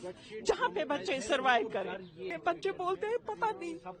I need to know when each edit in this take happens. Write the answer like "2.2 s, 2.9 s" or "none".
2.3 s